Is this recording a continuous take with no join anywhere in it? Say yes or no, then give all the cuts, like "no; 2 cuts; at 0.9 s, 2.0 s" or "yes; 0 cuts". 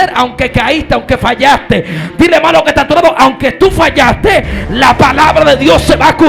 yes; 0 cuts